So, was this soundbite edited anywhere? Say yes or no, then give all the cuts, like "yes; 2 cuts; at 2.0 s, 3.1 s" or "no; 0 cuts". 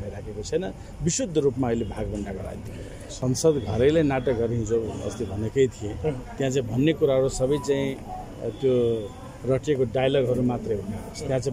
yes; 1 cut; at 3.1 s